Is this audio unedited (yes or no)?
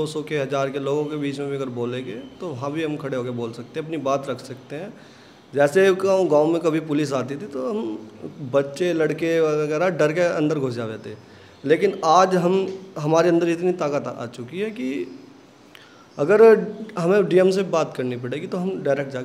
yes